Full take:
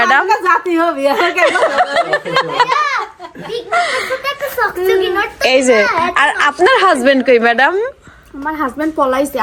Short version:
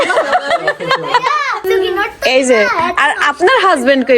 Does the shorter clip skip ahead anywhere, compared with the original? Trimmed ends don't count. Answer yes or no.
yes